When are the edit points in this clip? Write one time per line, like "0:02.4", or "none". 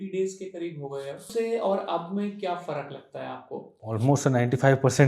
0:01.3
0:03.8